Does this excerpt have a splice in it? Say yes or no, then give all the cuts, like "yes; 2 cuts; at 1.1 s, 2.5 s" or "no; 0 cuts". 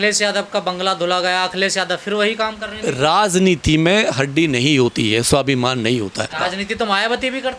no; 0 cuts